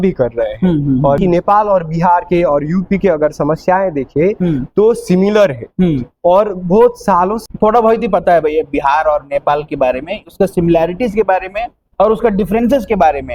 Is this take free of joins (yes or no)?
no